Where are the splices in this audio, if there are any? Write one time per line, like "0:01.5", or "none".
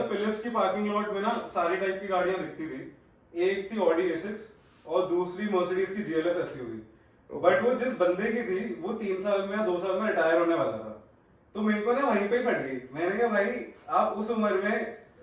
none